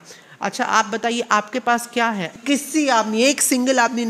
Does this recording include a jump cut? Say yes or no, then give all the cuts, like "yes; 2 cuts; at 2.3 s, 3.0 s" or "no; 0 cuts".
yes; 1 cut; at 2.4 s